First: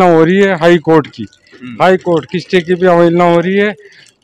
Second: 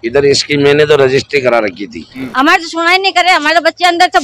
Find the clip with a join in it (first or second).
second